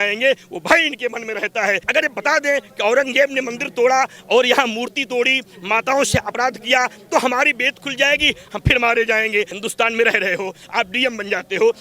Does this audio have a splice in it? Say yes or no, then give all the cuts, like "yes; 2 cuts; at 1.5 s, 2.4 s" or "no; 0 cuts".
yes; 2 cuts; at 1.8 s, 9.5 s